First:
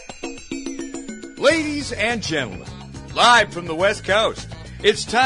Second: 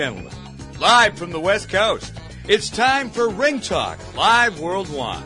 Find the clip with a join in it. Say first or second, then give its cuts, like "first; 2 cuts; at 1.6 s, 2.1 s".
first; 1 cut; at 1.4 s